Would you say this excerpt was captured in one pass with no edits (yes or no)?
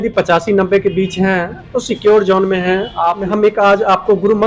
no